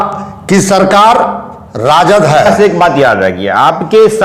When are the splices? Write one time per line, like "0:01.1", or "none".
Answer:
0:02.5